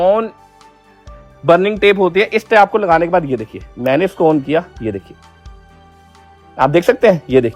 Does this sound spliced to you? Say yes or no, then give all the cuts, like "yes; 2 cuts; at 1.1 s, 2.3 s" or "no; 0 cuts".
no; 0 cuts